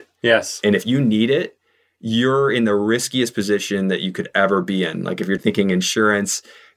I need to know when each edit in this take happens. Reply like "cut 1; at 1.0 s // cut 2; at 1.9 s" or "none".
cut 1; at 5.4 s